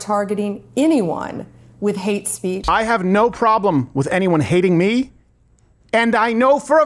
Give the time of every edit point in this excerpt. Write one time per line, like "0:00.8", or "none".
0:02.6